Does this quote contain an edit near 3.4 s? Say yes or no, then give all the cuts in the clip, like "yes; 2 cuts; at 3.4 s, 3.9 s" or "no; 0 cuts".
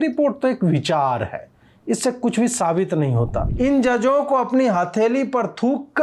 yes; 1 cut; at 3.4 s